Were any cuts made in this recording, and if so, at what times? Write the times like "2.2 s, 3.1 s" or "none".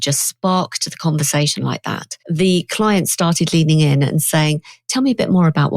2.1 s